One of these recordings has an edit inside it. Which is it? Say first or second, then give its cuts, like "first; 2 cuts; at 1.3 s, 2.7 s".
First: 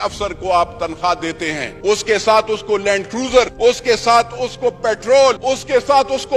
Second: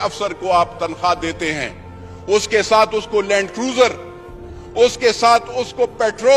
first; 3 cuts; at 1.7 s, 3.5 s, 5.4 s